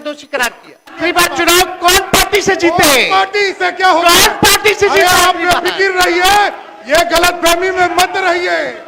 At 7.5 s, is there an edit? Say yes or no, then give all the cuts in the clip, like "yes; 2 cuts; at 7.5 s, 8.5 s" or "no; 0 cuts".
no; 1 cut; at 0.9 s